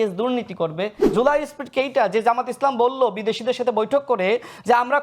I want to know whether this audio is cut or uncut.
cut